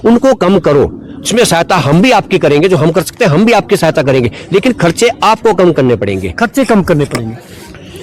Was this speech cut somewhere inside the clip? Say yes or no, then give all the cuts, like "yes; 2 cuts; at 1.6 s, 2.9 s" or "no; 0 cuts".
no; 0 cuts